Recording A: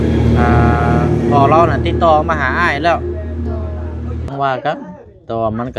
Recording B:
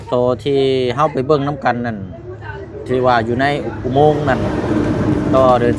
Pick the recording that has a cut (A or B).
A